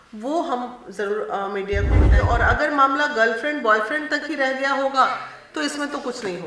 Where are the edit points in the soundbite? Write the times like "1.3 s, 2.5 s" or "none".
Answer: 2.1 s